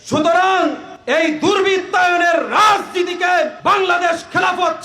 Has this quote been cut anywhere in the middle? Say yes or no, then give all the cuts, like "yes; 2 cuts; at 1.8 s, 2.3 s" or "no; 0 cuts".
yes; 2 cuts; at 0.9 s, 3.5 s